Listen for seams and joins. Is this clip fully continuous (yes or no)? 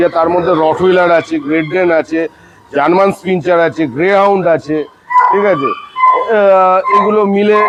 yes